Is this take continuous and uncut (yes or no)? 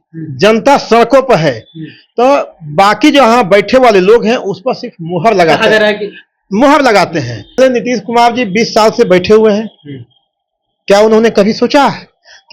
no